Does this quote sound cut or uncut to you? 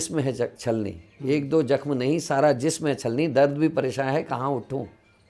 uncut